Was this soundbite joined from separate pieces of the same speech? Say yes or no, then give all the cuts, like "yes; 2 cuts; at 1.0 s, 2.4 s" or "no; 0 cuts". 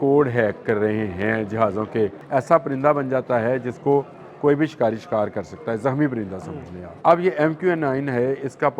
yes; 2 cuts; at 2.2 s, 6.8 s